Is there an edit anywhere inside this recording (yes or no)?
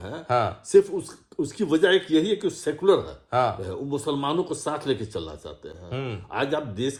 no